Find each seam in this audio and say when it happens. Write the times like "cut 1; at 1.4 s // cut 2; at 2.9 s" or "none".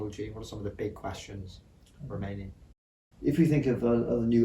cut 1; at 3.0 s